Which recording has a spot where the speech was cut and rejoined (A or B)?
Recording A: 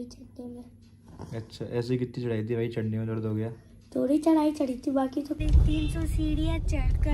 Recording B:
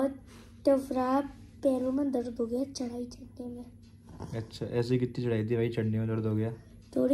A